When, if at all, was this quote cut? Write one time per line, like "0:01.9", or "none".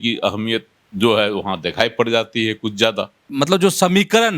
0:03.2